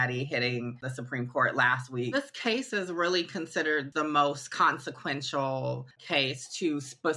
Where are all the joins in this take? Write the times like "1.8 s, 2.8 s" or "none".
2.1 s, 3.9 s, 5.9 s